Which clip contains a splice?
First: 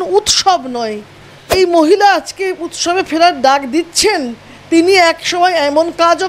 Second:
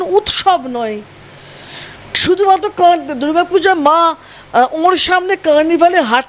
first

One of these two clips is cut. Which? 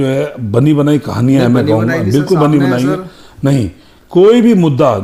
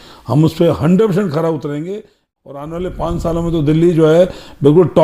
second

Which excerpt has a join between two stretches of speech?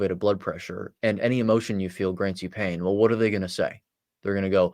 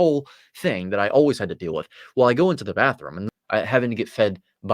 second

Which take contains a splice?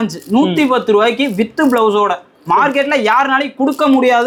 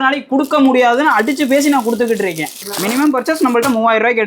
second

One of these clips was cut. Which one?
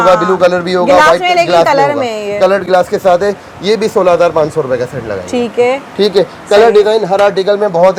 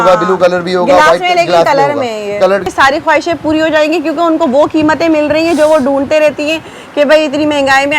second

